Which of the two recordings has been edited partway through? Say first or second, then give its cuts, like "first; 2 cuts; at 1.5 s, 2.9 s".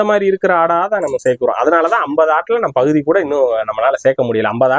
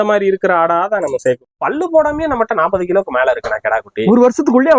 second; 1 cut; at 1.4 s